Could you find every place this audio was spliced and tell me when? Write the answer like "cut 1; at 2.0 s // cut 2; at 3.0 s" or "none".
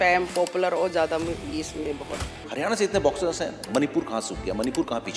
cut 1; at 2.4 s

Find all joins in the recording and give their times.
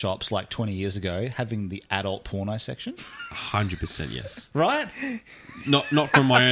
none

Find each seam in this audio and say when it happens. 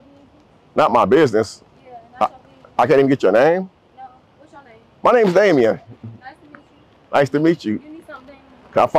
none

